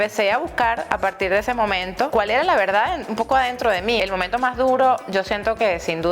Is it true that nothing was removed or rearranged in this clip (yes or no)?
no